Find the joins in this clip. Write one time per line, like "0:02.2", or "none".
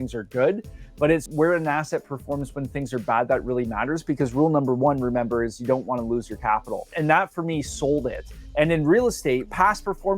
0:01.3